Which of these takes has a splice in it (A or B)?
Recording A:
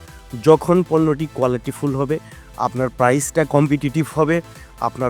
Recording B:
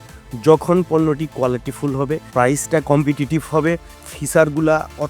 B